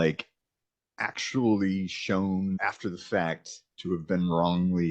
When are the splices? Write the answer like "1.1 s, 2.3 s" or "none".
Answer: 2.6 s